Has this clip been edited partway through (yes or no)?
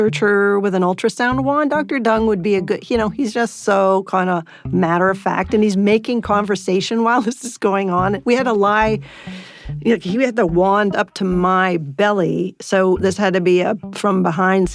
no